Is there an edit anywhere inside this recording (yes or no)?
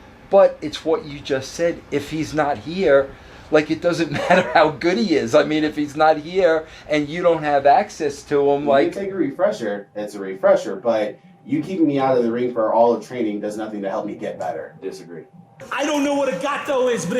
yes